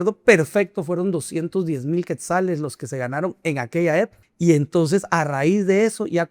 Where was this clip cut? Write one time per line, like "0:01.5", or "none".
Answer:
0:04.2